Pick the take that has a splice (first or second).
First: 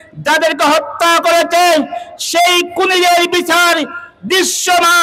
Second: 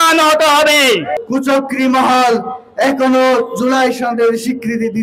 second